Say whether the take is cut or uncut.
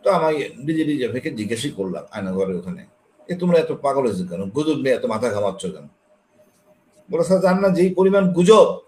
uncut